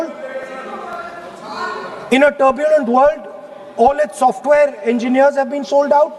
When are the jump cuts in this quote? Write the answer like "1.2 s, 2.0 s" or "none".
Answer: none